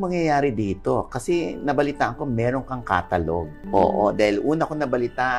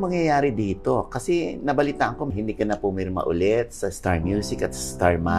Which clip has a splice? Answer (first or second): second